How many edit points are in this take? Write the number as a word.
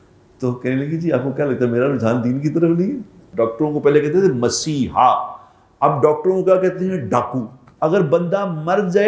two